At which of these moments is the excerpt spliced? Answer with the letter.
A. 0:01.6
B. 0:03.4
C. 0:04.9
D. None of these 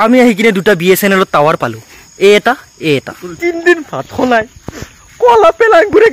B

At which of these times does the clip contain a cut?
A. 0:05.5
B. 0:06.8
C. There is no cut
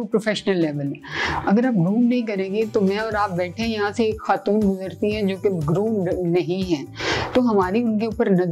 C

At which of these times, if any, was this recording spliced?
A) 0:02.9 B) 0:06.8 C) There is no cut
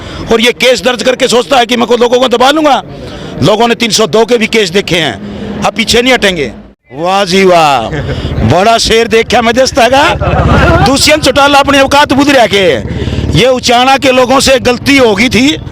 B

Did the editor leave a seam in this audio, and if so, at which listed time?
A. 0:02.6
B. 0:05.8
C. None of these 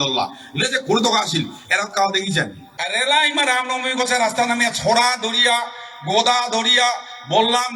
A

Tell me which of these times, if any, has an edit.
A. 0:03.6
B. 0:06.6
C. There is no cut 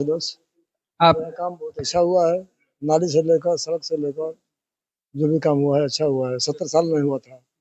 C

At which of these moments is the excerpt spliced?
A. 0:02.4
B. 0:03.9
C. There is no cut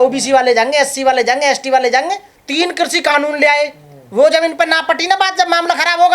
A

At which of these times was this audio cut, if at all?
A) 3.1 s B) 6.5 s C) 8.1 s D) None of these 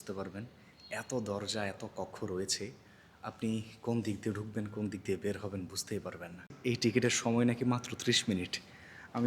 B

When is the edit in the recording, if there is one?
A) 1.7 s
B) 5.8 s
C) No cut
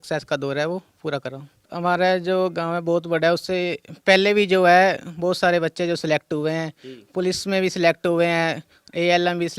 A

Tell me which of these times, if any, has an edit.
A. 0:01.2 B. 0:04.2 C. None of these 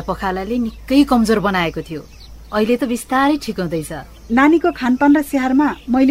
B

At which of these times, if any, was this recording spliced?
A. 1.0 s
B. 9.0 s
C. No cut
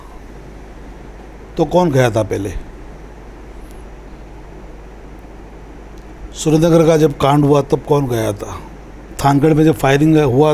C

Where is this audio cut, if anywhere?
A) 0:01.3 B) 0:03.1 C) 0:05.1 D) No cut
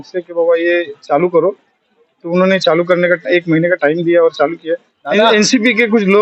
C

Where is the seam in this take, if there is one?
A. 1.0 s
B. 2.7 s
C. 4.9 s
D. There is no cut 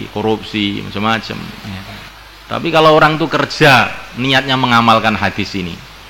B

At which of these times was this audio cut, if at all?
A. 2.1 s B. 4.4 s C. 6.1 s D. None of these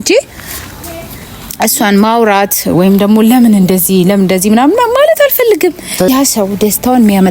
C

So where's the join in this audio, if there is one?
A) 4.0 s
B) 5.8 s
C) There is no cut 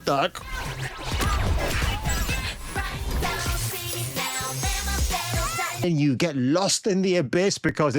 B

